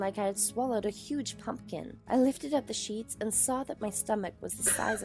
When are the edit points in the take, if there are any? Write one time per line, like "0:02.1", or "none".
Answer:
0:02.0